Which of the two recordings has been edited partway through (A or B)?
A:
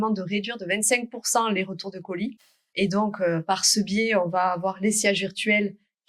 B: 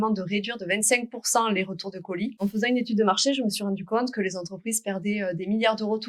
B